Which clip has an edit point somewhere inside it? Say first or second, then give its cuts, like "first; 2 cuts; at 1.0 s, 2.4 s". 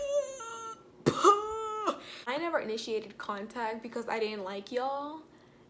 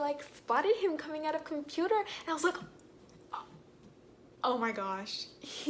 first; 1 cut; at 2.3 s